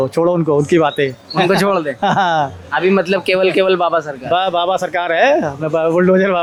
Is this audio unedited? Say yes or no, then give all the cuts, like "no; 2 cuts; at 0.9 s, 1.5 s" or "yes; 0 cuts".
yes; 0 cuts